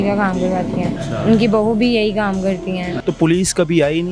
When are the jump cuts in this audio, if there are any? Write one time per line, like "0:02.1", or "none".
0:01.0
0:03.0